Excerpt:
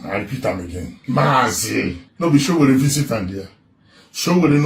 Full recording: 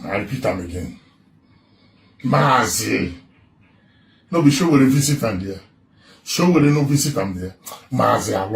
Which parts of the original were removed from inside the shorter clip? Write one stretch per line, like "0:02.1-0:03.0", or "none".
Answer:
0:00.9-0:02.1
0:03.2-0:04.2